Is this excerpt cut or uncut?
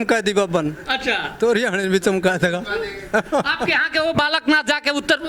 uncut